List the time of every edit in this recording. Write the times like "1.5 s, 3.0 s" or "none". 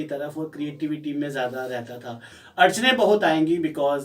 2.4 s